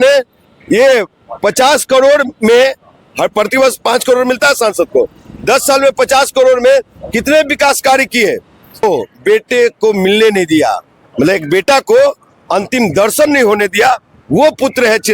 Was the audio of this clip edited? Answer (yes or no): yes